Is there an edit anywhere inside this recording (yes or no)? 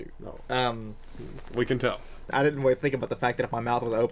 yes